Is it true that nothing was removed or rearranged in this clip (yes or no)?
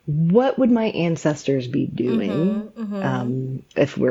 yes